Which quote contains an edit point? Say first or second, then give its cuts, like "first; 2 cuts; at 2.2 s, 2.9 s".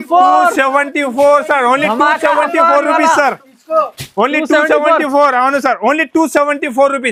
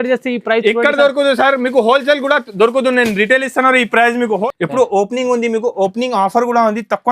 second; 1 cut; at 4.4 s